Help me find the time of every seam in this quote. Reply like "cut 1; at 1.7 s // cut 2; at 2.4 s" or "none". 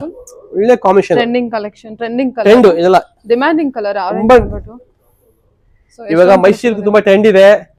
none